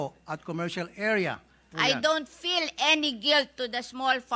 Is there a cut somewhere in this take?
yes; 1 cut; at 1.7 s

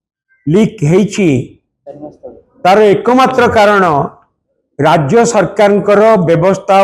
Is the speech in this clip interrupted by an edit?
no; 0 cuts

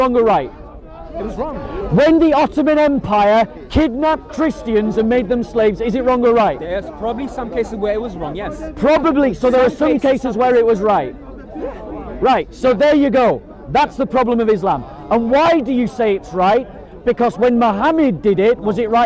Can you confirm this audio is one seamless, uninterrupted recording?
yes; 0 cuts

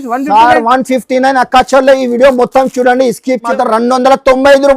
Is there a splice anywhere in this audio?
yes; 1 cut; at 3.4 s

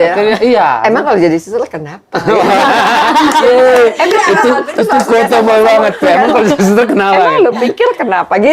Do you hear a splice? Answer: no; 0 cuts

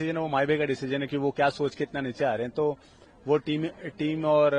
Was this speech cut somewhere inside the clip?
no; 0 cuts

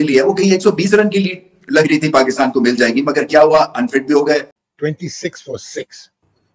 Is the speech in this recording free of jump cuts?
no; 1 cut; at 4.6 s

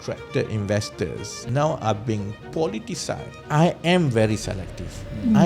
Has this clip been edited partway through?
yes; 2 cuts; at 1.3 s, 3.3 s

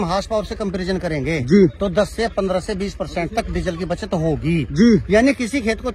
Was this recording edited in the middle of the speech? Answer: no; 0 cuts

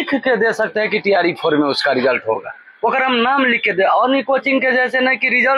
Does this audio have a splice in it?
no; 0 cuts

